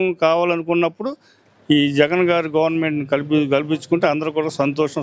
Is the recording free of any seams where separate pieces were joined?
yes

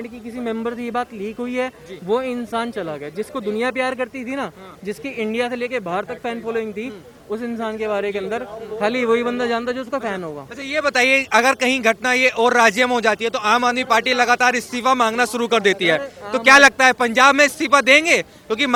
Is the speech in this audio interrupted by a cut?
no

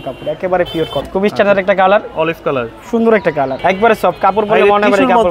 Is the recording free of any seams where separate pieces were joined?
no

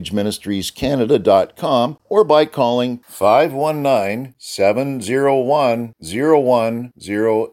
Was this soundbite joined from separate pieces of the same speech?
yes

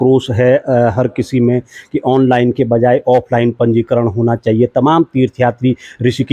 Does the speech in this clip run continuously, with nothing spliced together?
yes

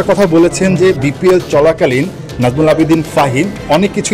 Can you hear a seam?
no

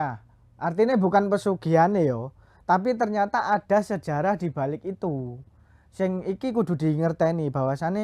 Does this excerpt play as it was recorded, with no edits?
yes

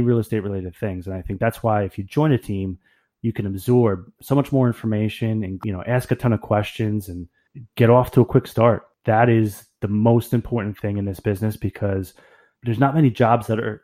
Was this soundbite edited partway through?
yes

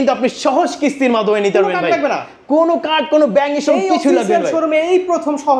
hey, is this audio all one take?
yes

